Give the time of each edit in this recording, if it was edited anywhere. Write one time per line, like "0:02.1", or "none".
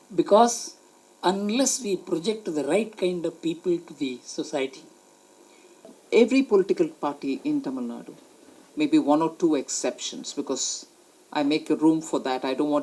0:06.0